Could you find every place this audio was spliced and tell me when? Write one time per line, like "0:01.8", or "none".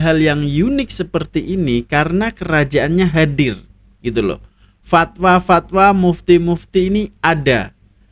none